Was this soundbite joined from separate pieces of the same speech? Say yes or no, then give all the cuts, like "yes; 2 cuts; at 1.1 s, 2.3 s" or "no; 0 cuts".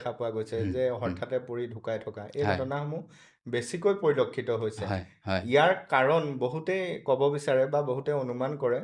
no; 0 cuts